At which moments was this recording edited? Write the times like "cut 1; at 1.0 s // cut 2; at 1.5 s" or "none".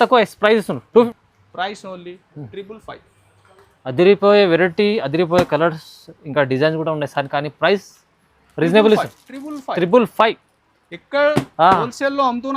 cut 1; at 1.1 s